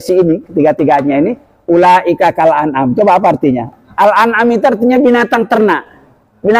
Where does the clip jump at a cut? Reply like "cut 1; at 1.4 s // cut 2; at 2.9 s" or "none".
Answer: cut 1; at 3.7 s